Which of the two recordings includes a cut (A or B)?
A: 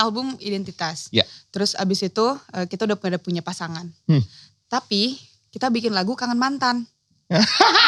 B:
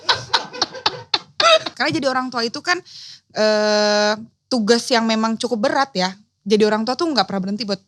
B